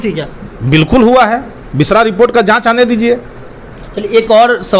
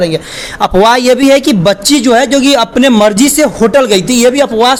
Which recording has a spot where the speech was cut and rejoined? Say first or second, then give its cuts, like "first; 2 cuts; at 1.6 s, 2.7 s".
first; 1 cut; at 3.6 s